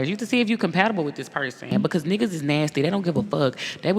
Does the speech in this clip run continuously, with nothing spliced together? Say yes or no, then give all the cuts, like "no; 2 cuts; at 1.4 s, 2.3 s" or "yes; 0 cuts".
no; 1 cut; at 1.7 s